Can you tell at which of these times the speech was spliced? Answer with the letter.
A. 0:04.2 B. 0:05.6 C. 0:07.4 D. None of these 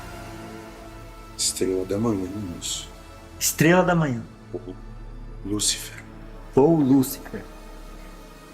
C